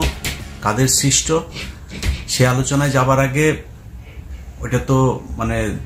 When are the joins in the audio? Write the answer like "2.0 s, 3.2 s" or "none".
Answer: none